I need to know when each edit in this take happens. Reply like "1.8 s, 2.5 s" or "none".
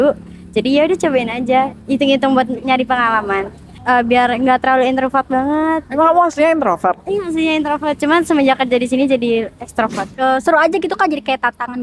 3.7 s, 10.1 s